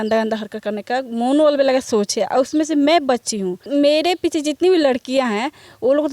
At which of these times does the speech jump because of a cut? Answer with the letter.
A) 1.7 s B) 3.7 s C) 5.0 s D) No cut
B